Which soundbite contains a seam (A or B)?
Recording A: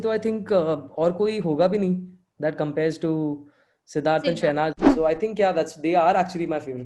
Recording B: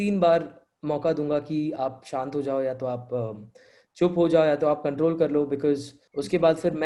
A